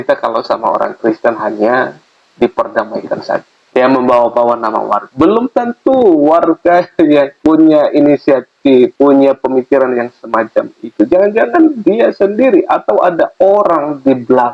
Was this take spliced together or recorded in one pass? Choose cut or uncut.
cut